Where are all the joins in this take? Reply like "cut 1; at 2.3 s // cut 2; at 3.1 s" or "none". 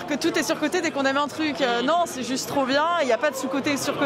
none